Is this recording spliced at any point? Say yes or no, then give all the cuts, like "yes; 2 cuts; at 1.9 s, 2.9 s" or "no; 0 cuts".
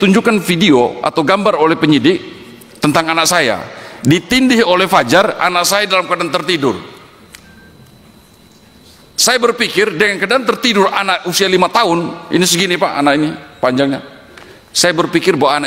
no; 0 cuts